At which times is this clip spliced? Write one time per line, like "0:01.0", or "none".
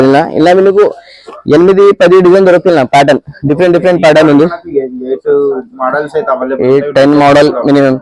none